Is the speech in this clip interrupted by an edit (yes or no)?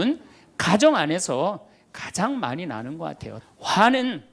yes